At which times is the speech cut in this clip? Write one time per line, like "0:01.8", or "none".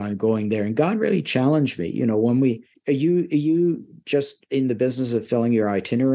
0:02.7